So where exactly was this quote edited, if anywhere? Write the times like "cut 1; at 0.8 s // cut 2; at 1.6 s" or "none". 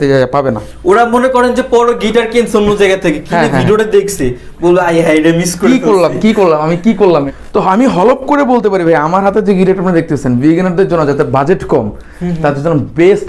cut 1; at 7.3 s

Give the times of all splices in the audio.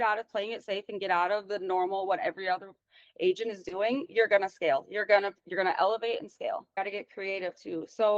cut 1; at 6.8 s

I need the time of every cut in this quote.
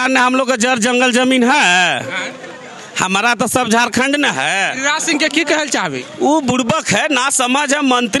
none

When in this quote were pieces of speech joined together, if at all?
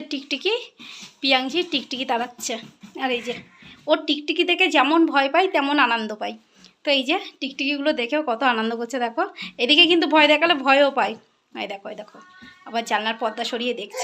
none

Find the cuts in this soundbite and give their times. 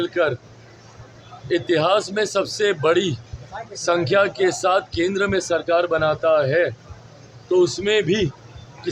none

